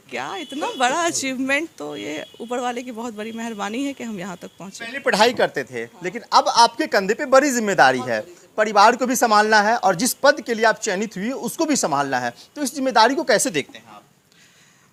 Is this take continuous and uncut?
yes; 0 cuts

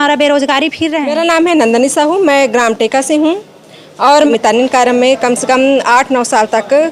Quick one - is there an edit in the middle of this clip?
yes; 2 cuts; at 1.1 s, 4.3 s

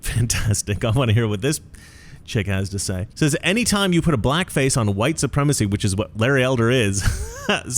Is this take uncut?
no; 1 cut; at 3.1 s

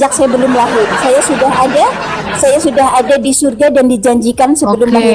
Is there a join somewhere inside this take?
no; 0 cuts

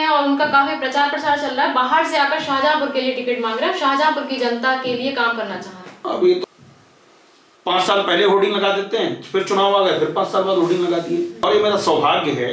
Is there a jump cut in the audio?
yes; 2 cuts; at 6.4 s, 11.3 s

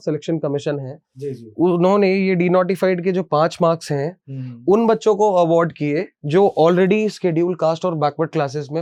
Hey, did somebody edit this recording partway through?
no; 0 cuts

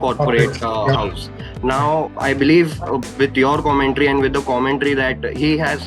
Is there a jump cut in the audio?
yes; 1 cut; at 2.1 s

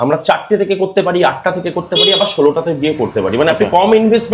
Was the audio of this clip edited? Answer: no; 0 cuts

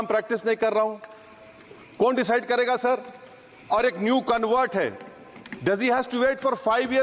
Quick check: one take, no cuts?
yes; 0 cuts

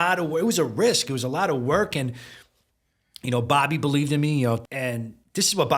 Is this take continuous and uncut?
no; 1 cut; at 4.7 s

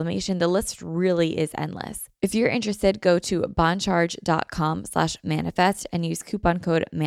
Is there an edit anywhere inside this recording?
yes; 1 cut; at 2.0 s

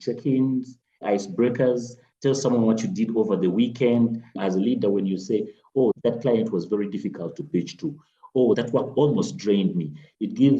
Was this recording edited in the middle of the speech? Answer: yes; 1 cut; at 4.4 s

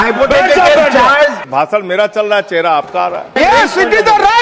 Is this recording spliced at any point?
yes; 2 cuts; at 1.4 s, 3.3 s

